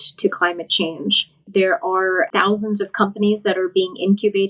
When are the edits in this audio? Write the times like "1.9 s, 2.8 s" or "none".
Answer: 1.4 s, 2.3 s